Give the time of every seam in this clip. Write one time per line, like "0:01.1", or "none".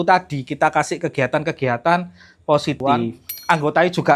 0:02.8